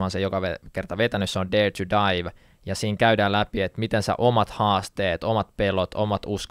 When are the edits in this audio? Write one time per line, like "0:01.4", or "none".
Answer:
none